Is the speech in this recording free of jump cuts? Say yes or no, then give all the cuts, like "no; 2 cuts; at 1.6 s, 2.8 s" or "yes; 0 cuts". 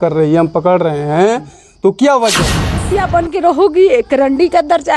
no; 1 cut; at 2.9 s